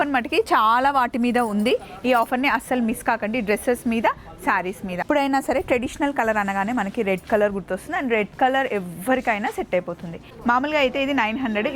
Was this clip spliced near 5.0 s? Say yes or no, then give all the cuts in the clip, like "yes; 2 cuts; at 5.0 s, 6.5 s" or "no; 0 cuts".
yes; 2 cuts; at 5.0 s, 10.4 s